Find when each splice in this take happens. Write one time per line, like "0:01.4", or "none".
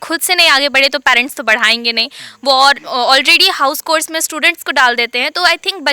none